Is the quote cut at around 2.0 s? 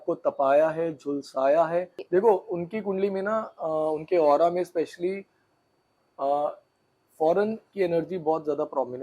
yes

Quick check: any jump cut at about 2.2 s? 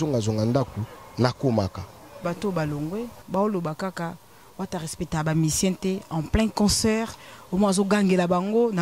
yes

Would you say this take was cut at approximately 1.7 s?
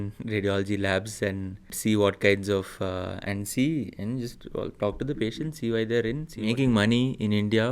yes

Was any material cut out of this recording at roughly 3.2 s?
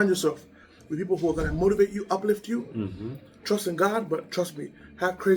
no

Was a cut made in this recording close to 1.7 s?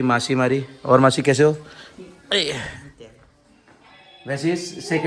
no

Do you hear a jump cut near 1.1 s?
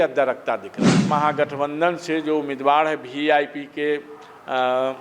yes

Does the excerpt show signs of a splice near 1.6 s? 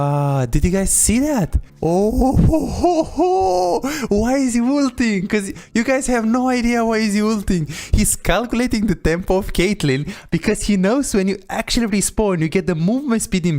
yes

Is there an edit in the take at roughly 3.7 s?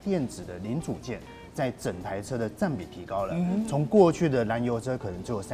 no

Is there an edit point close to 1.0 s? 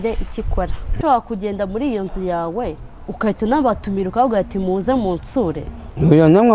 yes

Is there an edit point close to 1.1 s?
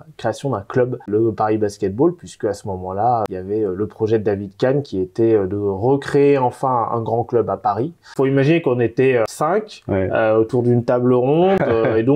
yes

